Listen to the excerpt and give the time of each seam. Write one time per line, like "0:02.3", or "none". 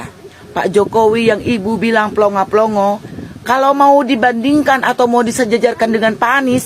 0:03.5